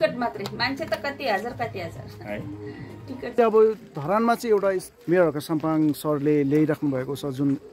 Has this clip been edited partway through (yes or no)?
yes